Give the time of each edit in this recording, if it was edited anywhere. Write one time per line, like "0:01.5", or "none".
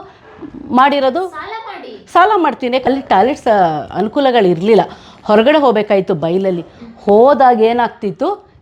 0:02.9

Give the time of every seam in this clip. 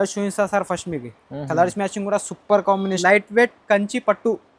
0:03.0

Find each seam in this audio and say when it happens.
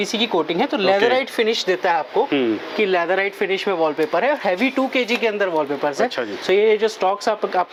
none

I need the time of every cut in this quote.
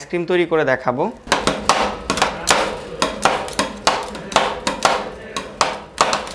none

